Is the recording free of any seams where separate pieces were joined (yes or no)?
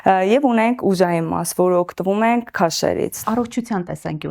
no